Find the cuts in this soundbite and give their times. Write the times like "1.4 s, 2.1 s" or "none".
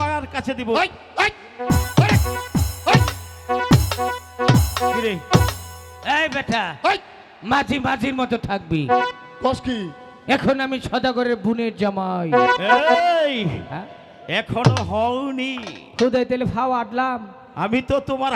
none